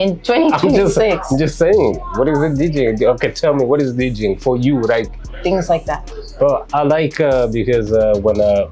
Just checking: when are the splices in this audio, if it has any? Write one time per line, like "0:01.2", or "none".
0:05.2